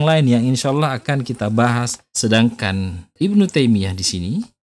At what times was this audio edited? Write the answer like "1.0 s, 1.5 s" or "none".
2.0 s

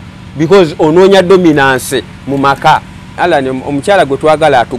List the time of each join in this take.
3.1 s

